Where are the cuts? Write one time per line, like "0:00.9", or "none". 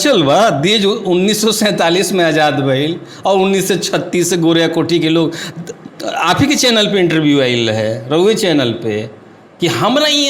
none